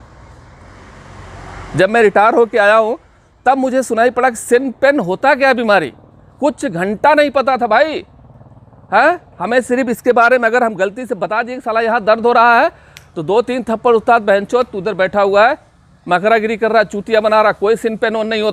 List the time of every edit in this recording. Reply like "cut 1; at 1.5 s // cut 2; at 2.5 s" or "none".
none